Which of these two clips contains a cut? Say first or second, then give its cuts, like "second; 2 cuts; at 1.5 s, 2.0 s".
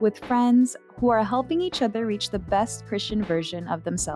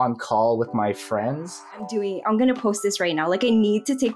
second; 1 cut; at 1.6 s